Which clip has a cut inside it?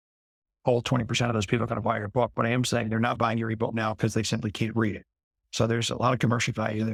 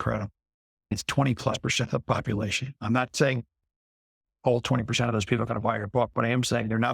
second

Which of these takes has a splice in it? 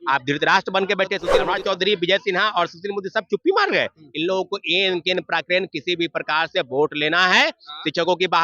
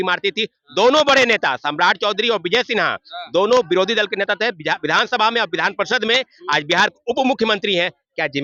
first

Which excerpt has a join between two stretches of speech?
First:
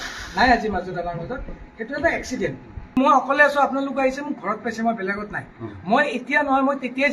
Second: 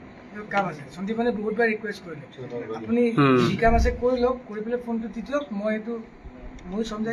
first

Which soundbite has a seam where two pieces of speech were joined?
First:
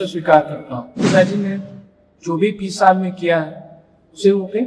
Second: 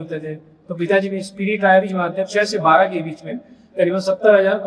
first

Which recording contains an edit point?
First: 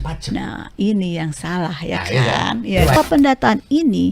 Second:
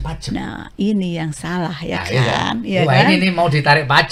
first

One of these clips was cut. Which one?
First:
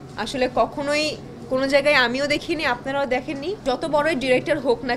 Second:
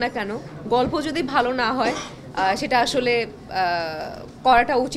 first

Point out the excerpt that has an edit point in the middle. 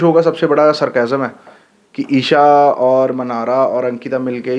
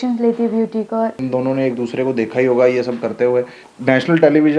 second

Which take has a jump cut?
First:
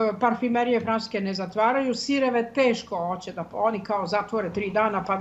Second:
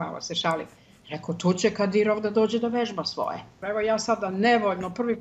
second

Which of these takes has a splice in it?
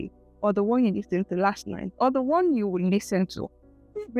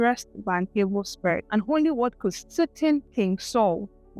second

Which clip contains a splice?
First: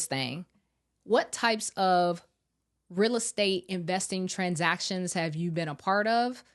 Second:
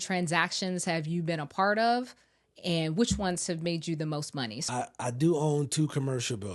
second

